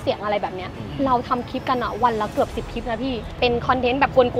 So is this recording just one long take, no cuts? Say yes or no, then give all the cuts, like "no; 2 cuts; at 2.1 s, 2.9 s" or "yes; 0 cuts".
no; 1 cut; at 3.3 s